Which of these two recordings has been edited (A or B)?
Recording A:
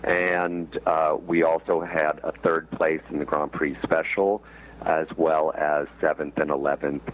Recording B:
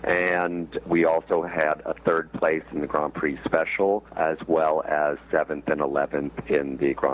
B